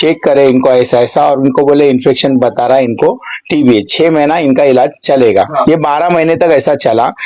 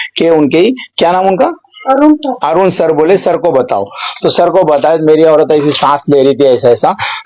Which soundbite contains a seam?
first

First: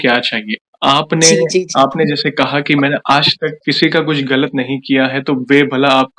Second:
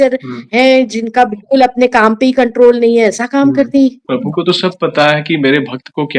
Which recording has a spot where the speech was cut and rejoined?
second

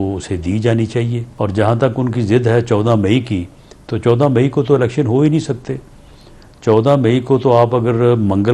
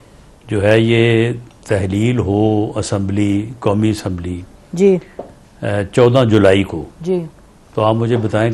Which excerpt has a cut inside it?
first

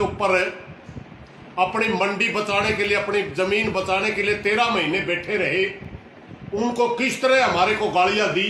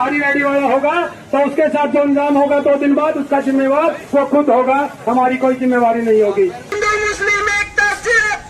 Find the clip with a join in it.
second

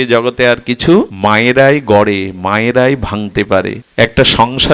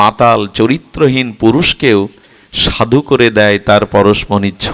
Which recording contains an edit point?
first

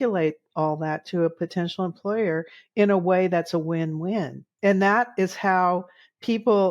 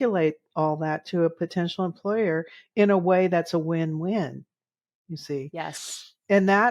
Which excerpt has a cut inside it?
first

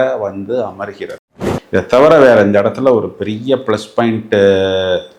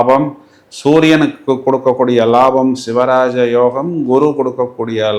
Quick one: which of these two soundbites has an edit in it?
first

